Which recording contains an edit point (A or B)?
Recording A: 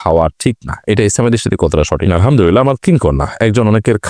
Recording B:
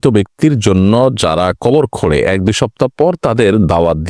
A